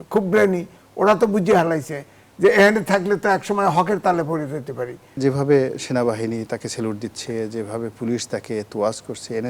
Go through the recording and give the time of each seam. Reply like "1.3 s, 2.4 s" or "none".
5.2 s